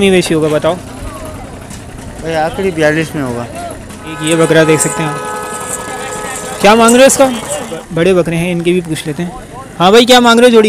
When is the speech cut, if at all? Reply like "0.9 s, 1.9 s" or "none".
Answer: 4.2 s, 7.8 s